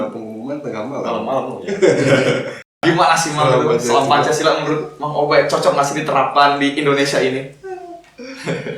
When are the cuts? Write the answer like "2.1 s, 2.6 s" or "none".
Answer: 2.8 s